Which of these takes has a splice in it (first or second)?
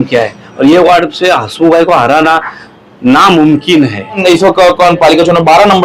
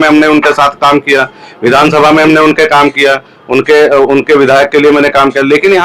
first